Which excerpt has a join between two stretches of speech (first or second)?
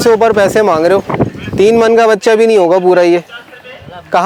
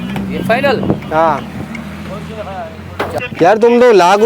second